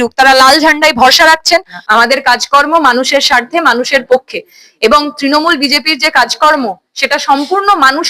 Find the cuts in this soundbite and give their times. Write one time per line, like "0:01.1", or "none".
0:01.8